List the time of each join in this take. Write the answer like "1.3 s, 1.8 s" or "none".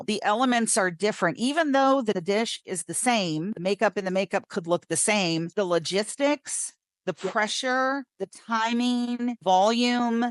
none